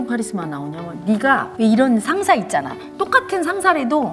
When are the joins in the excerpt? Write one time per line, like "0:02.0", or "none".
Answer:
0:01.5